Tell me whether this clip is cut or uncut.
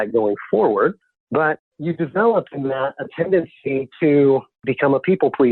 cut